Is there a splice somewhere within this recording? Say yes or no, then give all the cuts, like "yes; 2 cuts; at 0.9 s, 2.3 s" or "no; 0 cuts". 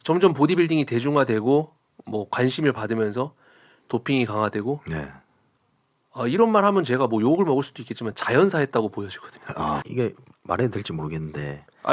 yes; 1 cut; at 9.9 s